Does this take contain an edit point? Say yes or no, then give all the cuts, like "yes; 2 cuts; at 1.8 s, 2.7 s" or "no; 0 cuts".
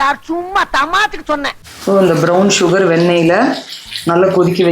yes; 1 cut; at 1.6 s